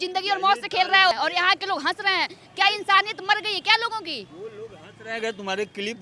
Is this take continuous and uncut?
no; 1 cut; at 1.1 s

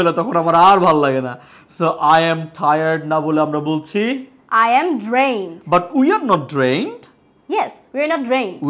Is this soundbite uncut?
yes; 0 cuts

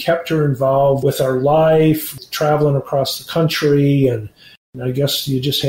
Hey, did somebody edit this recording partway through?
yes; 3 cuts; at 1.0 s, 2.2 s, 4.7 s

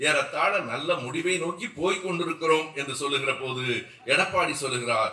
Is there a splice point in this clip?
no; 0 cuts

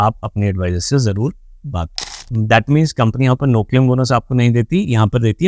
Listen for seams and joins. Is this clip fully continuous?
no; 1 cut; at 2.0 s

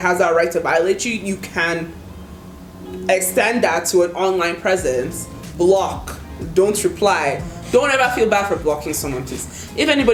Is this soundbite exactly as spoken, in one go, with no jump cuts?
yes; 0 cuts

